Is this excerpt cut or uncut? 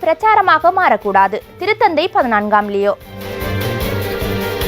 cut